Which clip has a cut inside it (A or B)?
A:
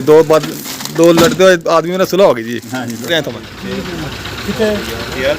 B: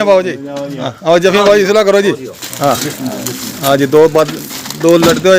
A